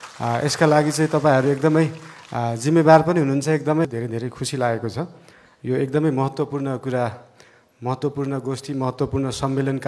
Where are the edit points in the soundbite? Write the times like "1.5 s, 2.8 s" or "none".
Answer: 3.9 s